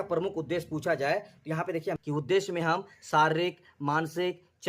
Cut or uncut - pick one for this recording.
cut